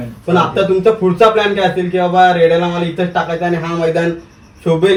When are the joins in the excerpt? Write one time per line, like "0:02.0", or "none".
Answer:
none